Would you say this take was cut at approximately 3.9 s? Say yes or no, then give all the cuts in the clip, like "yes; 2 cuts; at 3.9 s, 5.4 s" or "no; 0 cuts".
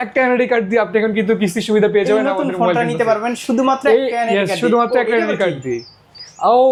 no; 0 cuts